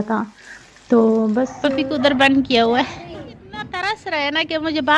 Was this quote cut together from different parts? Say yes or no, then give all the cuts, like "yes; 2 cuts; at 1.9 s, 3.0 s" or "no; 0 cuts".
yes; 2 cuts; at 1.6 s, 3.8 s